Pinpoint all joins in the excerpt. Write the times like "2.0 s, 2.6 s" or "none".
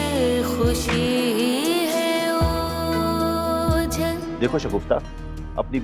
4.3 s